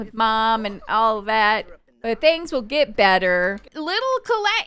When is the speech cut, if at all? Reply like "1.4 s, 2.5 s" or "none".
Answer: 3.7 s